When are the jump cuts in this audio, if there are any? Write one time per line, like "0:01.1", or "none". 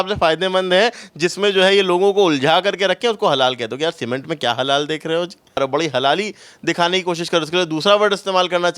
0:05.6